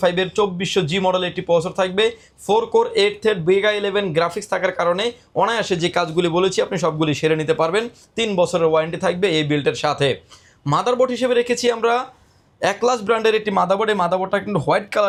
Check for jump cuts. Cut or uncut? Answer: uncut